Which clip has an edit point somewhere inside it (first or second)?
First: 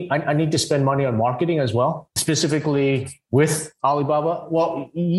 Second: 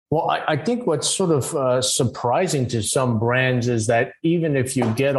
first